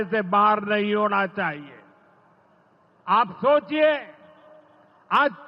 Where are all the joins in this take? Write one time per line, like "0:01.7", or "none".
none